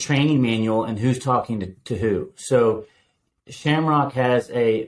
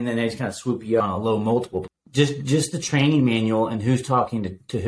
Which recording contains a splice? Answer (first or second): second